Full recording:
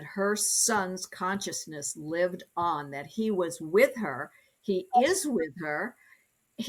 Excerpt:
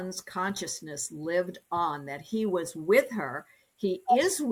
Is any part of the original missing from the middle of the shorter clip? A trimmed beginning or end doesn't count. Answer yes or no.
no